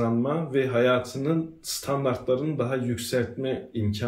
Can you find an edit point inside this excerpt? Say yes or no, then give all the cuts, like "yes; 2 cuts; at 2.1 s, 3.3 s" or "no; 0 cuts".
no; 0 cuts